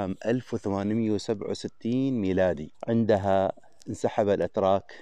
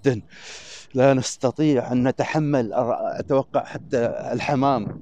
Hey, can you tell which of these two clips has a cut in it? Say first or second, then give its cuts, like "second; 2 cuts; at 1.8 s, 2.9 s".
first; 1 cut; at 2.7 s